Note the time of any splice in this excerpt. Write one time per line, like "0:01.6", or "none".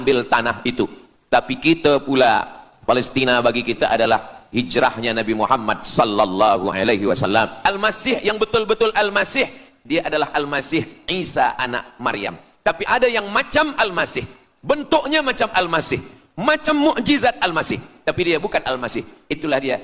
0:07.5